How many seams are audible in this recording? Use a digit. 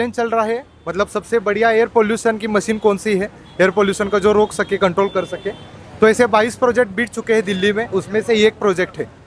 0